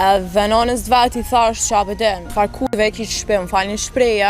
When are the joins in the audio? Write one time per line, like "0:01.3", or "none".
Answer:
0:02.2